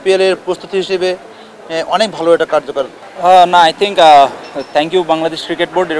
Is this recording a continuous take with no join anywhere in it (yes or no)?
yes